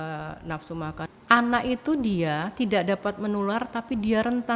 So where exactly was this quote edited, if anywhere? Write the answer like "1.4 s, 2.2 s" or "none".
1.0 s